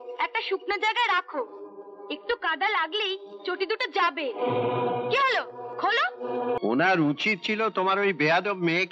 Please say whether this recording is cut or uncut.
cut